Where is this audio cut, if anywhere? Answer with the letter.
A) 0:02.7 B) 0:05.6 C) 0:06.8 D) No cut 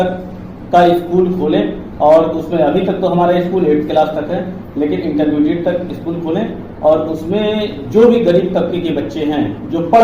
D